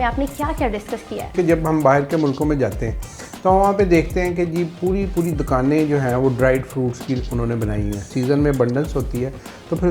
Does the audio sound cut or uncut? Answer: cut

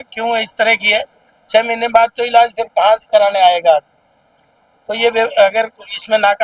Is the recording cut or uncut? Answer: uncut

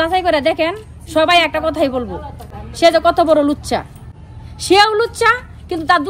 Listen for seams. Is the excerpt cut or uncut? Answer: uncut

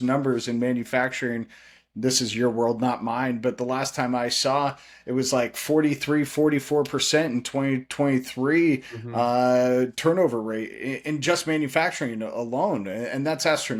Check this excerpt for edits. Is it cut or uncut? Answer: uncut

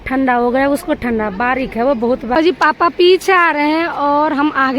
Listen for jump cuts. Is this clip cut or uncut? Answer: cut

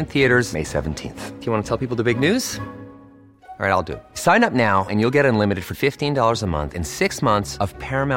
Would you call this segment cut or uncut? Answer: uncut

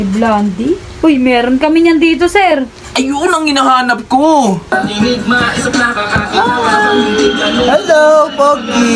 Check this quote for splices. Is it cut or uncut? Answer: cut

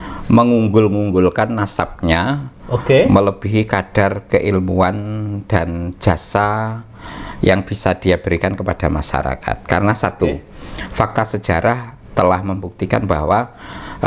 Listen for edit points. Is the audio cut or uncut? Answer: uncut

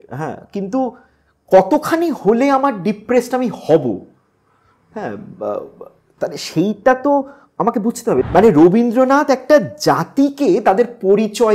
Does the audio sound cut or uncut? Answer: cut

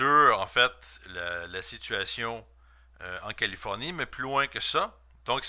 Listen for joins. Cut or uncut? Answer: uncut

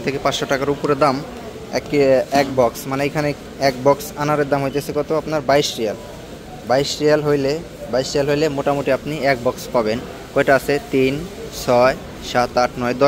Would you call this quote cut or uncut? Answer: uncut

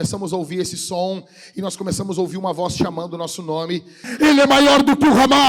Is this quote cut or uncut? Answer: cut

